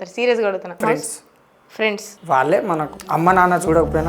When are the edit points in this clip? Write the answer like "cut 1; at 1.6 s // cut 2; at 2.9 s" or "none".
cut 1; at 0.8 s // cut 2; at 2.1 s // cut 3; at 3.0 s